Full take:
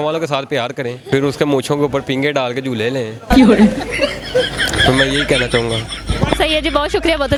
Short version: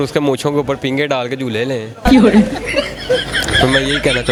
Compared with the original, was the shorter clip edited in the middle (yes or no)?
no